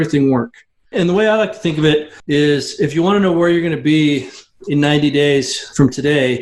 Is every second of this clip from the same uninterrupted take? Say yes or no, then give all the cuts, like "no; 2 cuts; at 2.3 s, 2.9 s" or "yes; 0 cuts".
no; 1 cut; at 0.9 s